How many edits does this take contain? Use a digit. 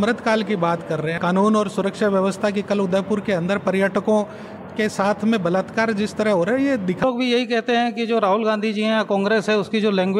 2